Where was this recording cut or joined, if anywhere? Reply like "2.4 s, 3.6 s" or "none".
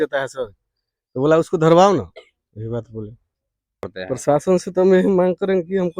4.0 s